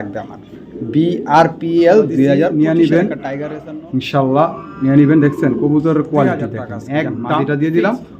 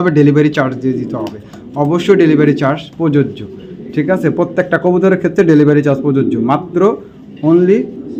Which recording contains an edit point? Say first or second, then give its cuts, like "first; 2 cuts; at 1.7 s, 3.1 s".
first; 2 cuts; at 2.5 s, 7.3 s